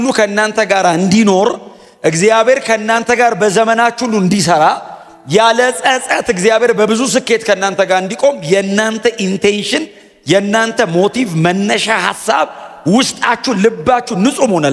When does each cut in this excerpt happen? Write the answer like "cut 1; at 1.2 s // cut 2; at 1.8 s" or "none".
none